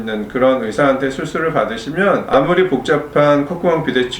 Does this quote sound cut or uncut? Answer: cut